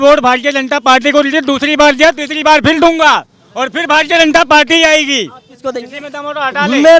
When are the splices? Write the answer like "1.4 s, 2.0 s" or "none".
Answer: none